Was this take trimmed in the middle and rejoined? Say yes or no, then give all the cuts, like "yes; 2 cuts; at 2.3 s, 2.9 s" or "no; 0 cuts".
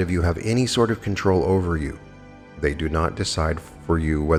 no; 0 cuts